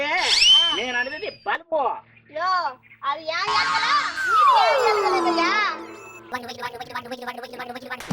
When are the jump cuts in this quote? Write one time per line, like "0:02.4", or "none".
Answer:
0:06.3